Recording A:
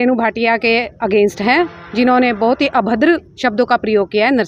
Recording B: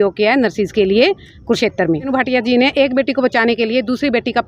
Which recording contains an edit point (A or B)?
B